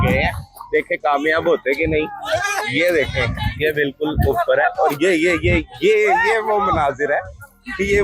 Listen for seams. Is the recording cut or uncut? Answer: uncut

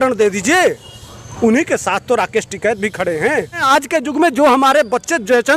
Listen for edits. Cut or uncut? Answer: cut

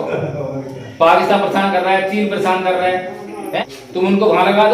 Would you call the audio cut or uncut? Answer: cut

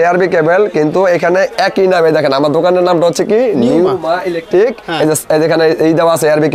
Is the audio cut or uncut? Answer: uncut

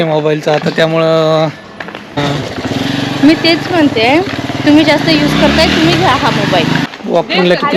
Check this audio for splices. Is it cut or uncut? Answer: cut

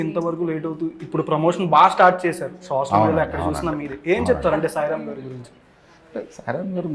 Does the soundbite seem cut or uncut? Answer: uncut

